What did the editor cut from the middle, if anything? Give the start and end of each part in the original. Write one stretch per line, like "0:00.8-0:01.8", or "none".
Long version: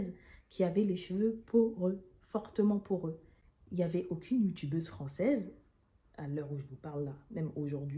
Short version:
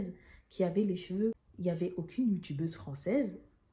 0:01.4-0:03.5

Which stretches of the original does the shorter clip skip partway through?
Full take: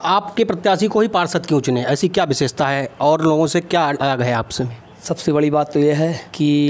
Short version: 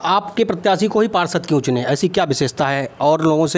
none

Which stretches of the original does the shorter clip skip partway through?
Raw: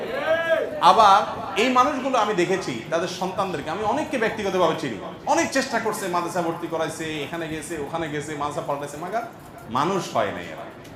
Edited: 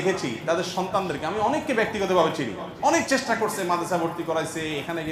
none

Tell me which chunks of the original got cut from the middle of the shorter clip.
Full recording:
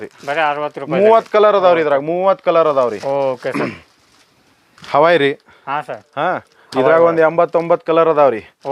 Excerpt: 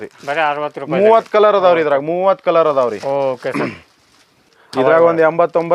0:04.6-0:06.5

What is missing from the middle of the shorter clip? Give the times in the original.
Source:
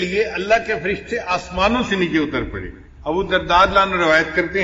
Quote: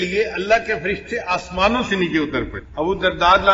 0:02.6-0:02.9

